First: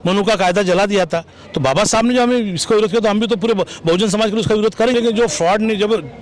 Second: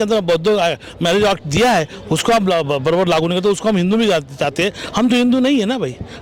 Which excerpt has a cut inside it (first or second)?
first